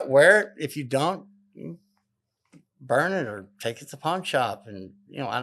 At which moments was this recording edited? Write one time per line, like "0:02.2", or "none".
none